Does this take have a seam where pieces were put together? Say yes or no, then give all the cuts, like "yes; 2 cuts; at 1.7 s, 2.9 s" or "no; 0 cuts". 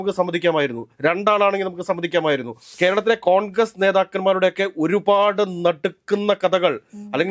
yes; 1 cut; at 2.7 s